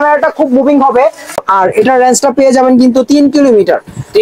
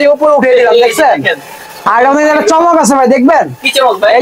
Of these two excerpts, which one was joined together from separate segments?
first; 1 cut; at 1.4 s

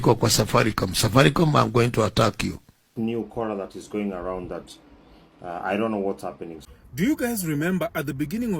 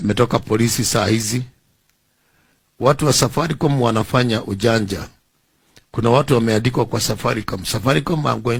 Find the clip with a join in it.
first; 2 cuts; at 2.9 s, 6.5 s

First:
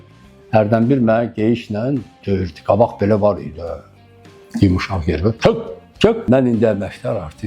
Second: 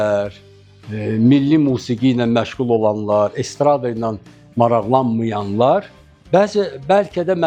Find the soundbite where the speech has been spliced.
first; 1 cut; at 6.2 s

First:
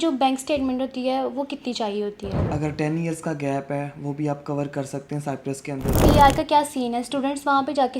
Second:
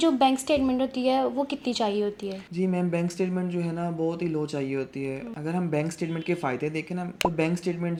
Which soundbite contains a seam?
first; 2 cuts; at 2.4 s, 6.0 s

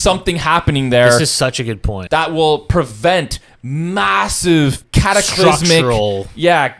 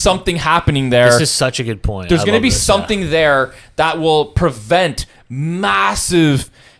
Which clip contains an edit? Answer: first; 2 cuts; at 1.9 s, 4.8 s

